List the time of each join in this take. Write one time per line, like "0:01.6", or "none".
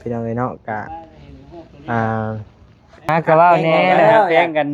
0:03.1